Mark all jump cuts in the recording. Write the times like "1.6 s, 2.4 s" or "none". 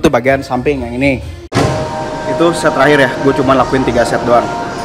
1.5 s

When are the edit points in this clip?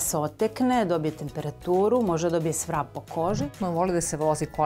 3.6 s

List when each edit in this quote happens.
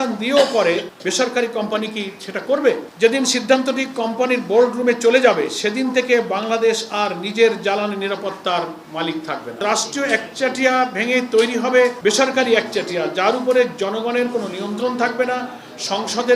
0.9 s, 2.9 s, 9.6 s

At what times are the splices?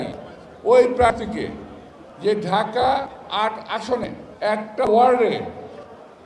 4.2 s

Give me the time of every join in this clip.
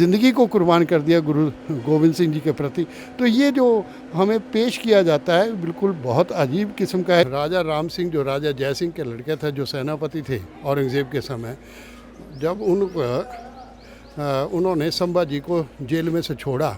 7.2 s

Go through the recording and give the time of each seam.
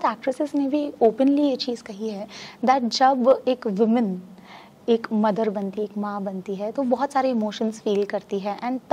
none

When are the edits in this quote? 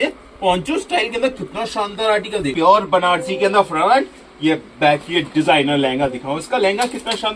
2.5 s

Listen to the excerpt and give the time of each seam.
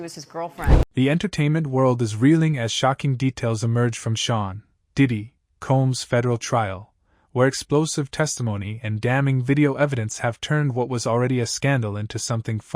0.9 s

